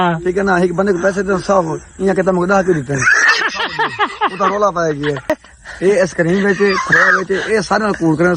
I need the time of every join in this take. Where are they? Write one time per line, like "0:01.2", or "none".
0:05.3